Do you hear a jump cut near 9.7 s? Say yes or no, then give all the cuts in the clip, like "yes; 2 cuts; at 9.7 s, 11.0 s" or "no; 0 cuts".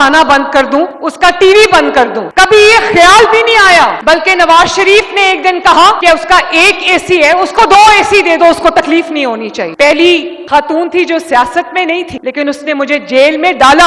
yes; 1 cut; at 9.7 s